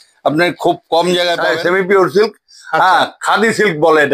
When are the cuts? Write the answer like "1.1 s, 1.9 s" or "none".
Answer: 1.4 s